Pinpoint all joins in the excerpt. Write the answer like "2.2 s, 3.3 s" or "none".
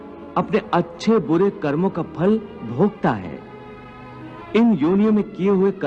4.4 s